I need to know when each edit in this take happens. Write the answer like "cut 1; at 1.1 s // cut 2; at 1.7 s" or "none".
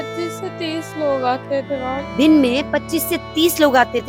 cut 1; at 2.1 s

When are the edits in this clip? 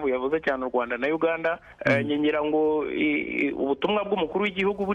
cut 1; at 1.7 s

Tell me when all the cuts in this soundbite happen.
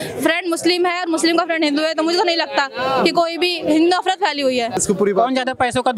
cut 1; at 4.7 s

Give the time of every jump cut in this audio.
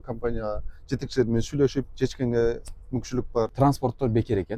cut 1; at 3.5 s

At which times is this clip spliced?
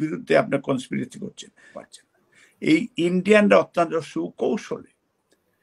cut 1; at 1.7 s

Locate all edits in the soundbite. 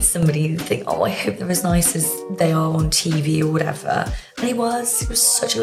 none

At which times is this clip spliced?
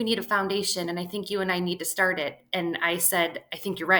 none

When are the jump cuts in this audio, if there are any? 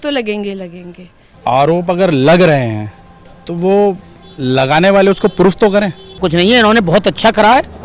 cut 1; at 1.3 s // cut 2; at 6.2 s

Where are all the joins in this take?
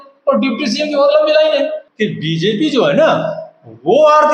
cut 1; at 1.8 s

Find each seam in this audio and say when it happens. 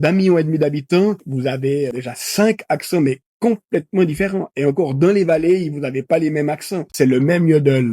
cut 1; at 2.1 s // cut 2; at 6.8 s

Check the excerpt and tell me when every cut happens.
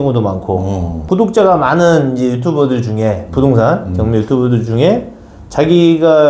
cut 1; at 1.0 s

